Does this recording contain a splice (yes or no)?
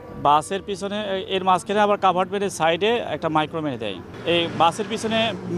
no